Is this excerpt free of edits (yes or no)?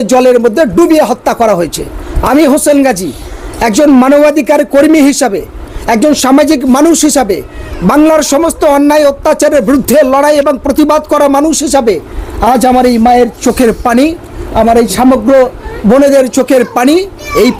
yes